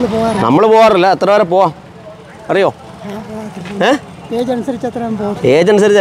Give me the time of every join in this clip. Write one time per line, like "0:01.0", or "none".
none